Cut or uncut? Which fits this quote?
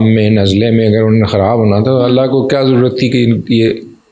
uncut